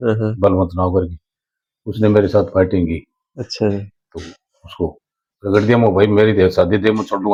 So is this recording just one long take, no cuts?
yes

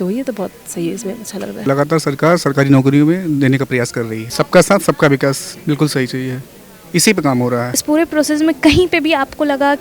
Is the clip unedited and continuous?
no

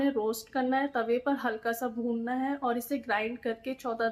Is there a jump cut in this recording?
no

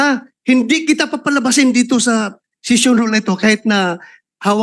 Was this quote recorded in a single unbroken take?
yes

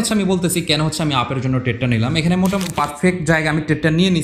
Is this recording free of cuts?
no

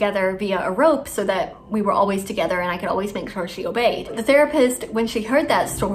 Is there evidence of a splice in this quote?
yes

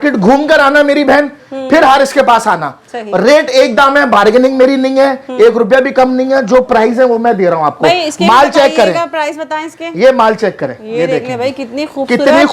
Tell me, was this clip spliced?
no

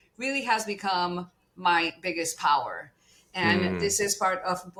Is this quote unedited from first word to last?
yes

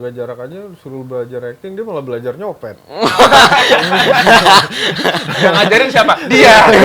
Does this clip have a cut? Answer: no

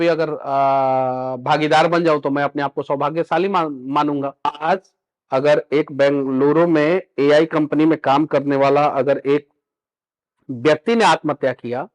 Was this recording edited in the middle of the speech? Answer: yes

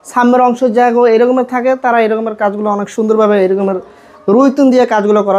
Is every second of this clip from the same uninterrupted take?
yes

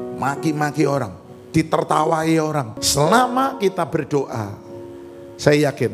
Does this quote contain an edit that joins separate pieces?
yes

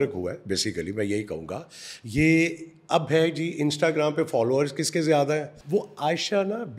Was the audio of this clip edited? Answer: yes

